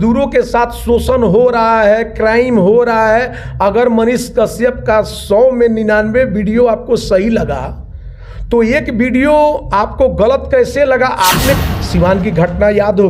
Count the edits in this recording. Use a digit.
1